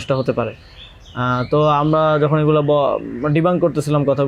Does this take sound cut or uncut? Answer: uncut